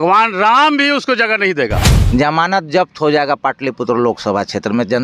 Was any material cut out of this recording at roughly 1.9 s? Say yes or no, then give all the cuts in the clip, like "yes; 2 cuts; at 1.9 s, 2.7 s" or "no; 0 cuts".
yes; 1 cut; at 1.9 s